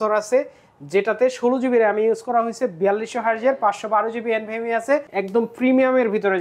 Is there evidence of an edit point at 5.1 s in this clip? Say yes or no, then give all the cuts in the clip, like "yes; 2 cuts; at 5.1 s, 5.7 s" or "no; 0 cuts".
yes; 1 cut; at 5.1 s